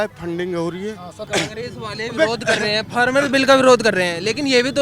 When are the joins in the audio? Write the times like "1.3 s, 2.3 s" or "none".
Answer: 1.1 s